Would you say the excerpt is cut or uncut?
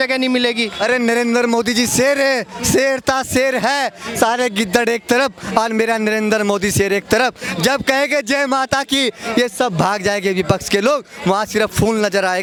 uncut